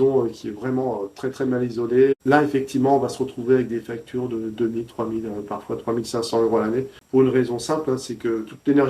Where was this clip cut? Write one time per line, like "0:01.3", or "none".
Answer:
none